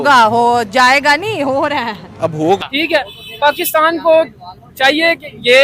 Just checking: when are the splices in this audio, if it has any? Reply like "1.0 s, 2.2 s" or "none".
2.6 s